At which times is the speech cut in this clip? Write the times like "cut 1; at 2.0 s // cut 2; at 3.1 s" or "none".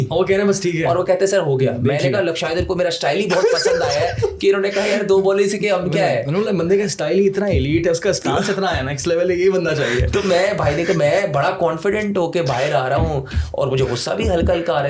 none